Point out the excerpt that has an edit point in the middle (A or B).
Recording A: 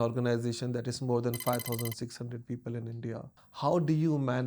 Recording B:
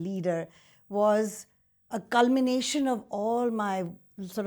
A